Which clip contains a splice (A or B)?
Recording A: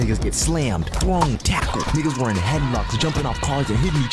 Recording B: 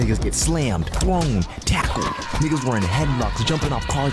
A